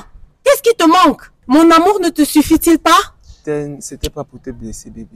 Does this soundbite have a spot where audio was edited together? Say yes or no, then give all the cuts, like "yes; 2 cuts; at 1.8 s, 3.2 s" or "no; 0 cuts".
yes; 2 cuts; at 1.3 s, 3.4 s